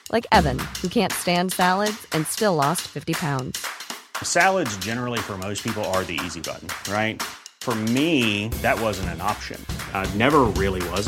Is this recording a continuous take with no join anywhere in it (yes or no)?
yes